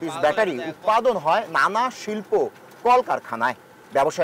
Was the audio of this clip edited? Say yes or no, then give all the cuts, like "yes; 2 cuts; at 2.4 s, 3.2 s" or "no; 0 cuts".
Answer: no; 0 cuts